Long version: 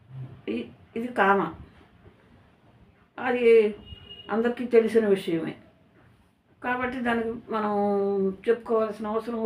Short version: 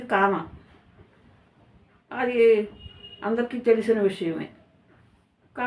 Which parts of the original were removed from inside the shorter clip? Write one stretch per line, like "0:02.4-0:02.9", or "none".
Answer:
none